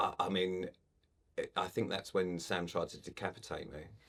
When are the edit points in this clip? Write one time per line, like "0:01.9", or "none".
none